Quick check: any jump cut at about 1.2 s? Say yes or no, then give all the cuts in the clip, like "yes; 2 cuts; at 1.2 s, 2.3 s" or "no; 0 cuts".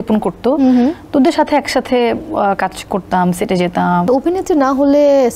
no; 1 cut; at 4.0 s